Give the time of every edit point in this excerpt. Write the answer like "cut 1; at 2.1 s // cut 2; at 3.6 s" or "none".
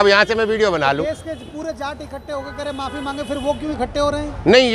none